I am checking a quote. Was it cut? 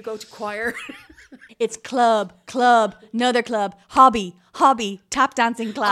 yes; 1 cut; at 1.5 s

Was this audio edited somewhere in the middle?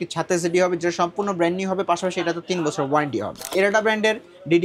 yes; 1 cut; at 3.5 s

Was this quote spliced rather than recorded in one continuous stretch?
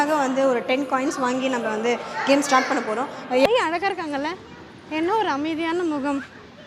yes; 1 cut; at 3.5 s

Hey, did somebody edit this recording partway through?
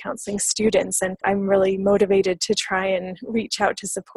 no; 0 cuts

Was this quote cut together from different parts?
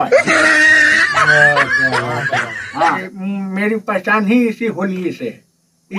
yes; 1 cut; at 3.1 s

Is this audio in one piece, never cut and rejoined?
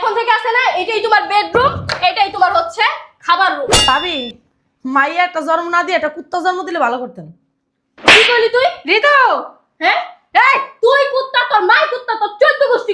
no; 1 cut; at 3.9 s

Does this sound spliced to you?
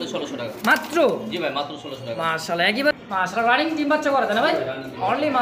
yes; 1 cut; at 2.9 s

